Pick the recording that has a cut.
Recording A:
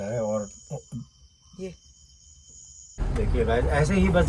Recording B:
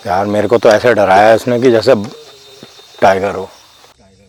A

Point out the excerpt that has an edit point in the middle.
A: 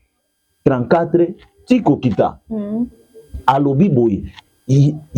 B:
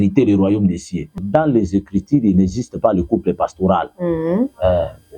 B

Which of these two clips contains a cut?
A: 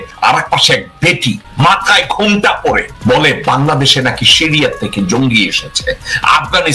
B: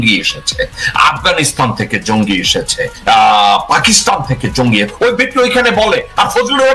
B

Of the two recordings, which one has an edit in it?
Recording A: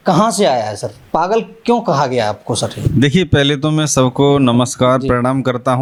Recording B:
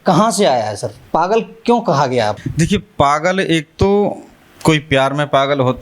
B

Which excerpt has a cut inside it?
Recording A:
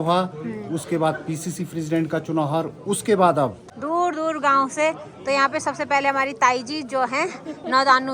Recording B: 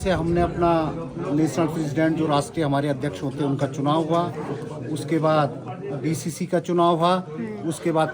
A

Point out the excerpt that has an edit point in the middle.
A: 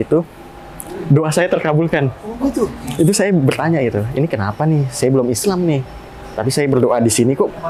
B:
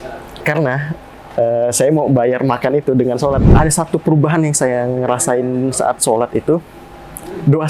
B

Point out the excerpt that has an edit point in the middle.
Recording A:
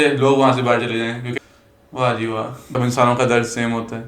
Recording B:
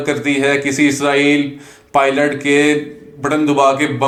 A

